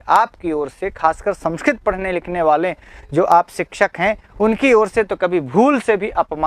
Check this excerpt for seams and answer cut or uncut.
uncut